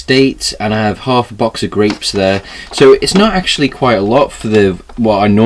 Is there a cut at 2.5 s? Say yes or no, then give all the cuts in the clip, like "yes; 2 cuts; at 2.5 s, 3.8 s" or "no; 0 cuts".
no; 0 cuts